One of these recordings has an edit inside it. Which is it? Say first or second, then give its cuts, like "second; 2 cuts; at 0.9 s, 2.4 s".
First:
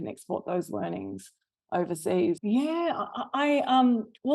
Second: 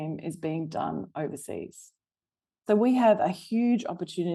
first; 1 cut; at 2.4 s